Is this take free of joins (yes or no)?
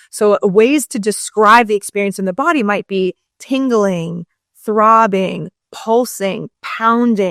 yes